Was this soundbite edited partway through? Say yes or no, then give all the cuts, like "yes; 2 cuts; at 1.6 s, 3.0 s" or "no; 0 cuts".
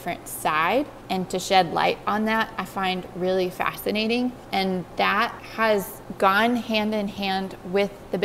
no; 0 cuts